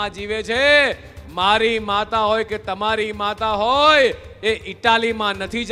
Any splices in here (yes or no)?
no